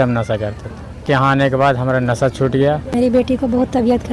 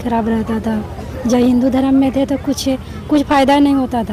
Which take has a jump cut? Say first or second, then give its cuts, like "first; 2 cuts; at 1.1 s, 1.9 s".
first; 2 cuts; at 1.0 s, 2.9 s